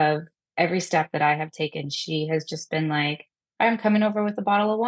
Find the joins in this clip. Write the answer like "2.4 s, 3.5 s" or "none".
none